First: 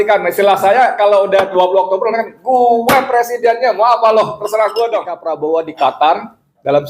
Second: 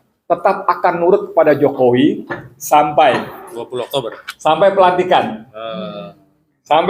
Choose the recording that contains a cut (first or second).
first